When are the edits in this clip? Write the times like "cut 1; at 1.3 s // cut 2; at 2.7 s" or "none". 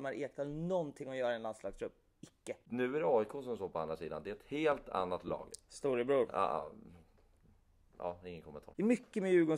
cut 1; at 2.6 s // cut 2; at 8.6 s